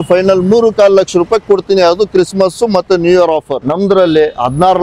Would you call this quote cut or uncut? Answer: cut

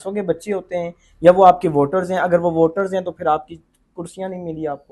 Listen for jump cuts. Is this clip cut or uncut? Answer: uncut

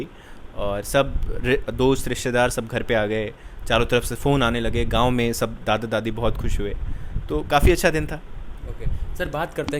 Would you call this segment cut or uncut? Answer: uncut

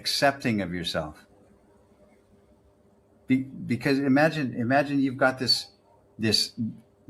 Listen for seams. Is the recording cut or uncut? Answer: uncut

